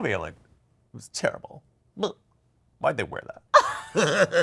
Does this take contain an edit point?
yes; 1 cut; at 3.4 s

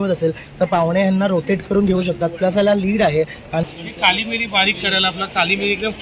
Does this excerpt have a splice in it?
yes; 1 cut; at 3.6 s

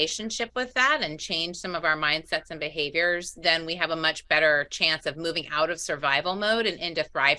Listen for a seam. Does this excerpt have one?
no; 0 cuts

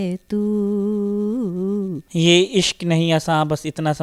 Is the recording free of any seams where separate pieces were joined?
no; 1 cut; at 2.0 s

